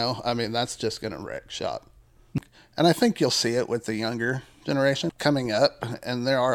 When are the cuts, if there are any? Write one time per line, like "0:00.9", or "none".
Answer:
0:02.3
0:05.0